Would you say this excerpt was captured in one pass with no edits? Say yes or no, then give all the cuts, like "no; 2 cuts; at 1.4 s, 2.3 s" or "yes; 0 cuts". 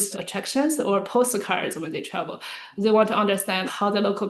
yes; 0 cuts